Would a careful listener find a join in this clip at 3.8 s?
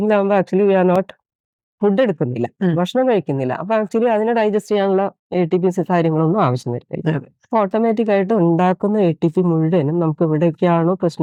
no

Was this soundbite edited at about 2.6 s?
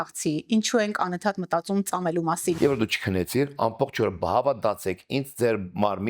yes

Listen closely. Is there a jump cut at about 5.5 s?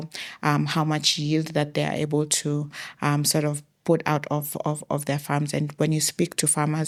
no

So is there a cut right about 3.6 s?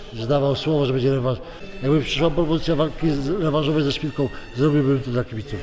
no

